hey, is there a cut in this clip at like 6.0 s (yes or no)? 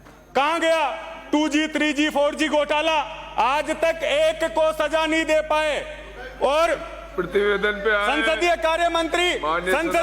no